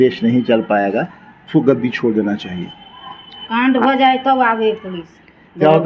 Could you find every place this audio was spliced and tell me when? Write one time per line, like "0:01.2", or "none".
none